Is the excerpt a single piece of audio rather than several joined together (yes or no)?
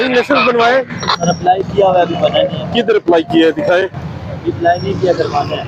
yes